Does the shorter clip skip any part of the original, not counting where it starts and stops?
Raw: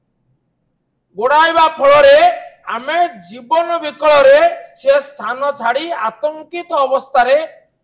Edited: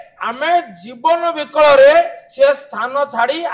no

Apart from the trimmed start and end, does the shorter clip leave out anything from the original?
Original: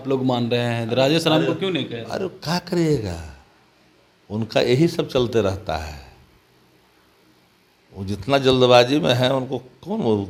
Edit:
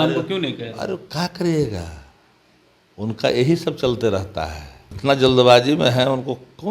yes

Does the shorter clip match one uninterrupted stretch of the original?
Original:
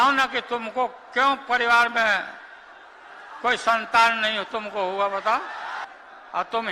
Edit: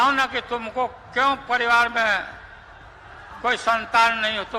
yes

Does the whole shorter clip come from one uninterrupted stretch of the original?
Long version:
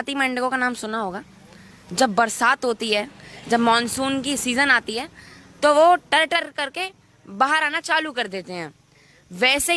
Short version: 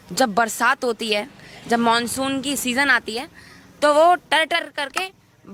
yes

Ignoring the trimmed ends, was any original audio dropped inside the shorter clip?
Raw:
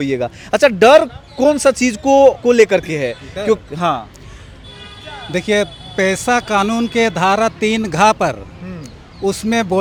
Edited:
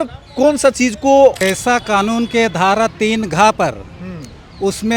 yes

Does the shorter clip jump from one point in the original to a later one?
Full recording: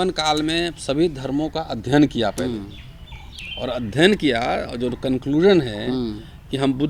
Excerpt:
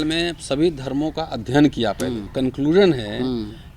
yes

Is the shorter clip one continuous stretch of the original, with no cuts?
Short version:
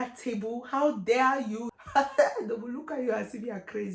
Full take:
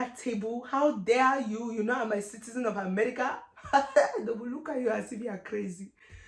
no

